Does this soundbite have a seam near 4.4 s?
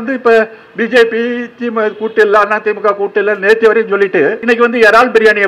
yes; 1 cut; at 4.4 s

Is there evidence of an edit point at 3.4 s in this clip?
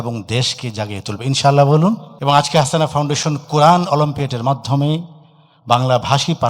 no; 1 cut; at 2.1 s

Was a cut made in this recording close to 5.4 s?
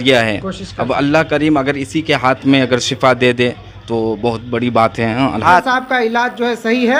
yes; 1 cut; at 5.4 s

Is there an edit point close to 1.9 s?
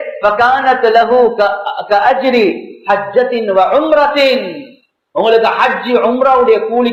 no; 0 cuts

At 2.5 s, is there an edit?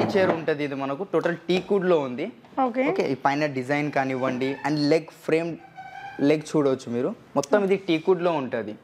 no; 0 cuts

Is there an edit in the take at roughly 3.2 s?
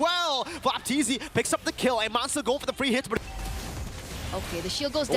yes; 1 cut; at 3.2 s

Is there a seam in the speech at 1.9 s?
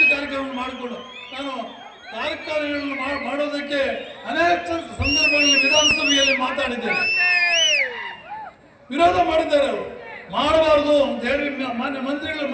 no; 0 cuts

